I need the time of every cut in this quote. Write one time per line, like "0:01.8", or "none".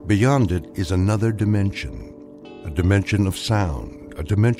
none